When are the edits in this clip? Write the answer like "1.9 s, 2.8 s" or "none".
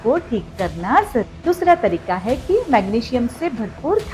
1.3 s